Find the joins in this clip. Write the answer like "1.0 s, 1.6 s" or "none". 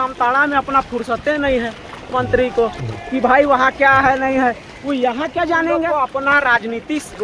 5.9 s

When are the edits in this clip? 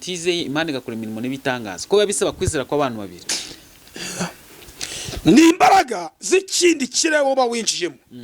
none

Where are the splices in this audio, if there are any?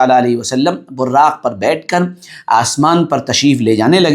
none

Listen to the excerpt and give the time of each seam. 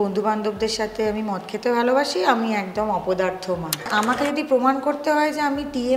3.9 s

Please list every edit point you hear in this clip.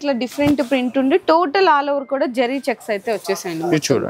none

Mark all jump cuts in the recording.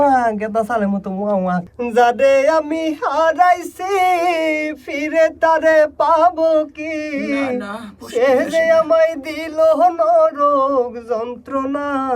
1.7 s

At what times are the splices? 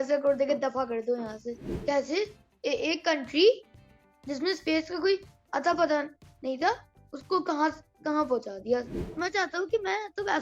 1.7 s, 9.0 s

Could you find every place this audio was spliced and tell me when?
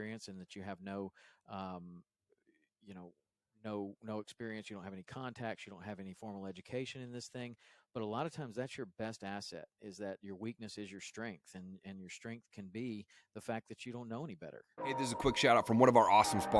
14.7 s

